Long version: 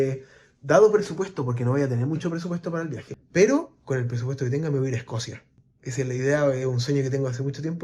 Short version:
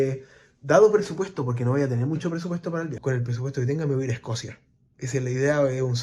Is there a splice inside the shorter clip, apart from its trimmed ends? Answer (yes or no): yes